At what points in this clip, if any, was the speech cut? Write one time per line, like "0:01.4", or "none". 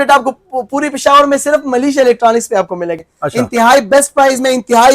0:03.0